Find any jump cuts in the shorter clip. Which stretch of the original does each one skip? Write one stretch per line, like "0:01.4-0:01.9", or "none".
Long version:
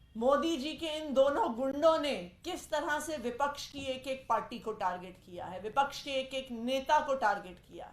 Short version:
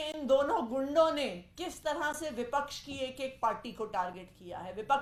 none

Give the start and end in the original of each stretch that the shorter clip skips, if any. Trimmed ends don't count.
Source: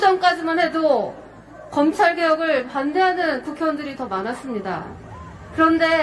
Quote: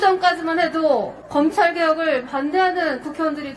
0:01.2-0:01.6

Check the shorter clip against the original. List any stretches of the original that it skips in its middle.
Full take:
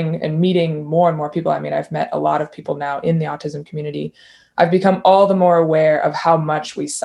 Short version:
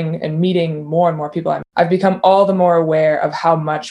0:01.6-0:04.5

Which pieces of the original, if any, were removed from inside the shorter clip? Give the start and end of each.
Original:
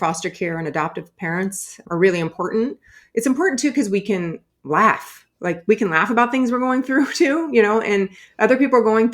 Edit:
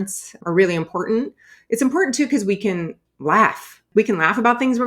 0:05.3-0:05.6

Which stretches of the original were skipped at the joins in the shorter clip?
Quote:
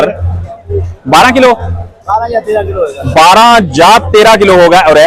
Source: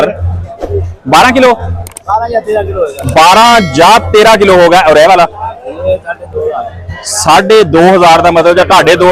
none

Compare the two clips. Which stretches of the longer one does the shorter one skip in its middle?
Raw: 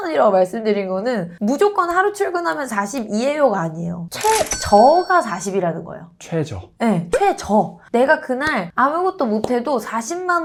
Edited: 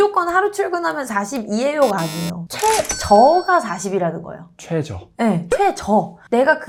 none

